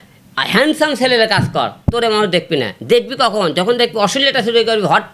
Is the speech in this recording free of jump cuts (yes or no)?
yes